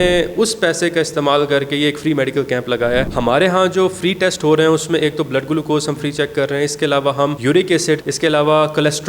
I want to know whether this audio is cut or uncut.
cut